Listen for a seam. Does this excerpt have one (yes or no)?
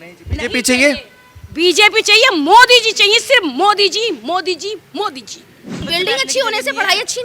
yes